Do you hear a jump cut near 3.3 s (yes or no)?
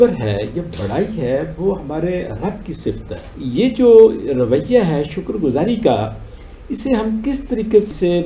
yes